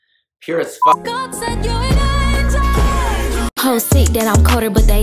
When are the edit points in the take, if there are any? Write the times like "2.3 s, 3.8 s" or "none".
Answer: 1.0 s, 3.5 s